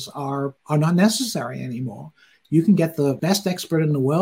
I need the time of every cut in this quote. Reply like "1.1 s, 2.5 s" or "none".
3.2 s

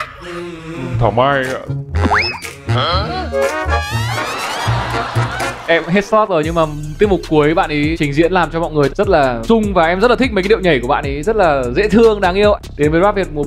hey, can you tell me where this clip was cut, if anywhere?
none

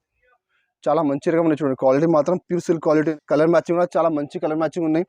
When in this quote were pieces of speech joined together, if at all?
3.1 s

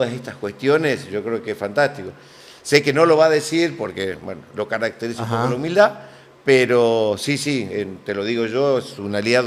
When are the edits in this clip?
none

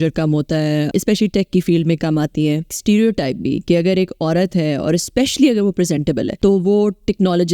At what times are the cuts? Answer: 0.9 s, 2.8 s, 6.3 s

